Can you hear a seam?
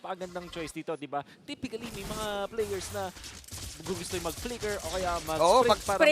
yes; 1 cut; at 2.2 s

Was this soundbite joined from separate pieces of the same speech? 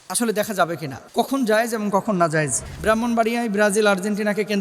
yes; 2 cuts; at 1.0 s, 2.6 s

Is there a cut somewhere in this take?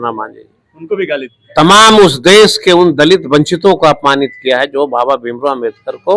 yes; 1 cut; at 1.4 s

